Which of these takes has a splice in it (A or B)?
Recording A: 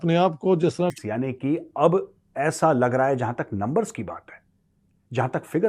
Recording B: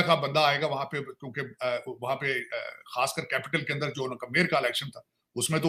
A